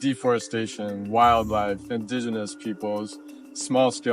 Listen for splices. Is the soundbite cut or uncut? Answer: cut